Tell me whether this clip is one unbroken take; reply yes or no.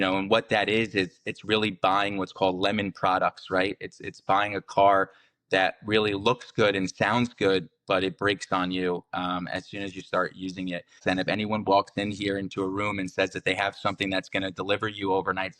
no